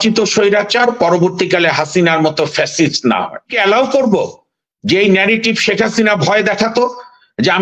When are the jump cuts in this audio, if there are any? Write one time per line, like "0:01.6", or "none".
0:03.5